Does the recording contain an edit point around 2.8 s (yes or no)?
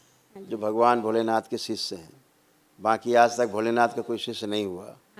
no